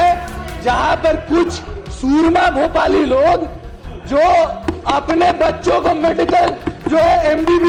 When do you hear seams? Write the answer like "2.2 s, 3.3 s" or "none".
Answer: none